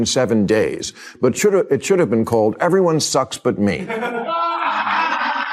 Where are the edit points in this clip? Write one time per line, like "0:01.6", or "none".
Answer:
none